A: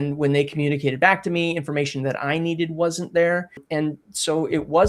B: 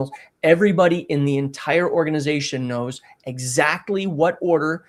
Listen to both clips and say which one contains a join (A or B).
A